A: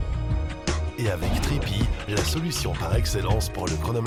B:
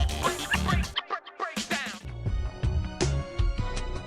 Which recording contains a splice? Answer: B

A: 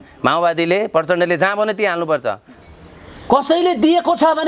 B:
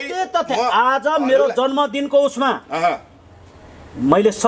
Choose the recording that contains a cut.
A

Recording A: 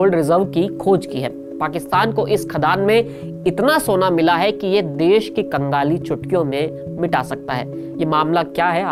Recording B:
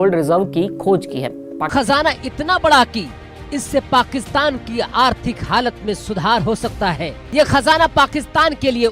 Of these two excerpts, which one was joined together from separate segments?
B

